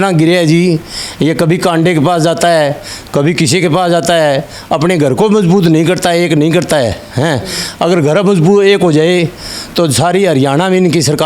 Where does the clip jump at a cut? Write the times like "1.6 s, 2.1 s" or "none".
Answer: none